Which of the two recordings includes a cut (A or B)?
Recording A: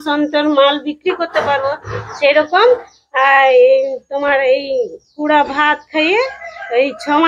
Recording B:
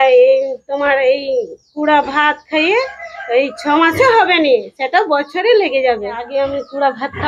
B